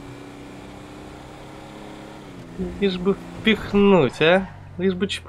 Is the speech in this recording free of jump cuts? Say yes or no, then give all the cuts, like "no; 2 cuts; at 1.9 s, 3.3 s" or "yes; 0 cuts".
yes; 0 cuts